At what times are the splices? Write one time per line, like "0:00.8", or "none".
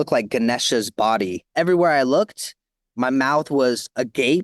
0:01.5